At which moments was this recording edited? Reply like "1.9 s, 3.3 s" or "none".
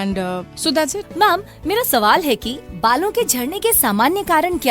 1.0 s, 2.5 s